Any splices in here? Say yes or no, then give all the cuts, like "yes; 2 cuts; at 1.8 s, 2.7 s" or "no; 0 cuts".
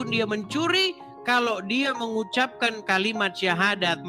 no; 0 cuts